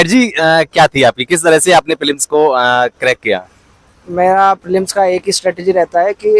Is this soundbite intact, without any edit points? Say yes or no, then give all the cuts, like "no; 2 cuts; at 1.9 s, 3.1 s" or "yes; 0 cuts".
yes; 0 cuts